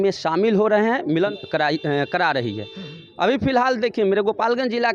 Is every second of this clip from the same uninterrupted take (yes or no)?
no